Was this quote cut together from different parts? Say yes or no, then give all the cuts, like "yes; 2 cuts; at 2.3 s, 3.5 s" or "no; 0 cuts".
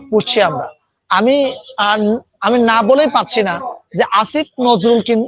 no; 0 cuts